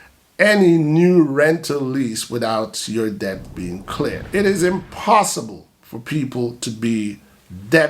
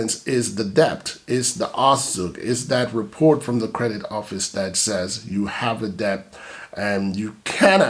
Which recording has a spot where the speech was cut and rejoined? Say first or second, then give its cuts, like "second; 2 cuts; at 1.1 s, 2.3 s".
first; 1 cut; at 4.2 s